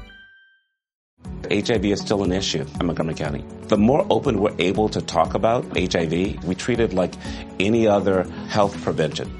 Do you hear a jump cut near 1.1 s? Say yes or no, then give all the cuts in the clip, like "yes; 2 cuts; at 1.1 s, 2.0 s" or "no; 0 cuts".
yes; 1 cut; at 1.1 s